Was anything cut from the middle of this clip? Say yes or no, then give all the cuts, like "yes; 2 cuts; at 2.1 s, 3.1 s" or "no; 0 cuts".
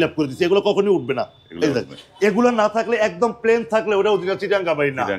no; 0 cuts